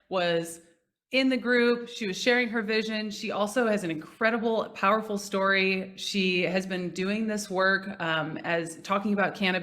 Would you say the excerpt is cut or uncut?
uncut